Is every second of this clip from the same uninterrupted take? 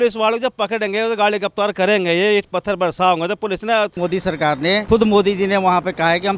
no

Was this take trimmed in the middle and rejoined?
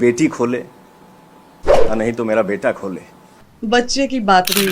yes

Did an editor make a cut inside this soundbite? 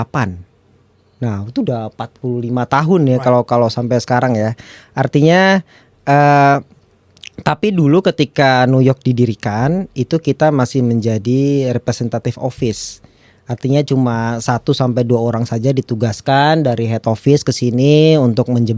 no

